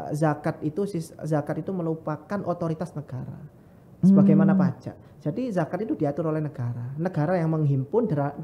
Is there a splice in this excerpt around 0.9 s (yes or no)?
no